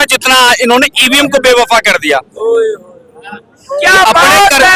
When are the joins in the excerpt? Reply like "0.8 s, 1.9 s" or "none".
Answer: none